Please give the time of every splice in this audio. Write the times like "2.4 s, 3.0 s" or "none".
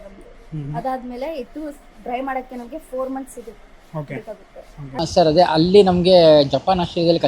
5.0 s